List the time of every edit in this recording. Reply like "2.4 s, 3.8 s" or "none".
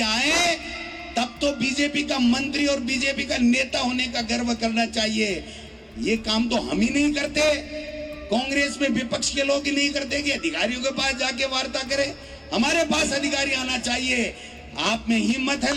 none